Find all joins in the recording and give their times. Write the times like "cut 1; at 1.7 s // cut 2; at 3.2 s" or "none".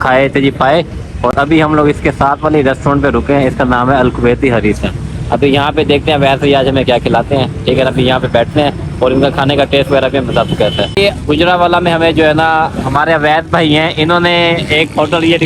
none